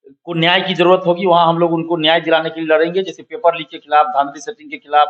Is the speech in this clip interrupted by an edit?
no; 0 cuts

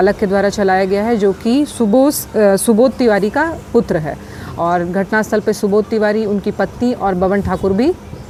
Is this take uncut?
yes; 0 cuts

